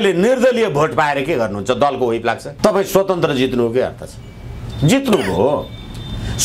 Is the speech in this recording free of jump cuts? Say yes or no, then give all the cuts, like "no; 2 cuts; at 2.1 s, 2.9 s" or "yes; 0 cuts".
yes; 0 cuts